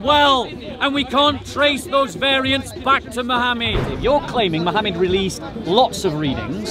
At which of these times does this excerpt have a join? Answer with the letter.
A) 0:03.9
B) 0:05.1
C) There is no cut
A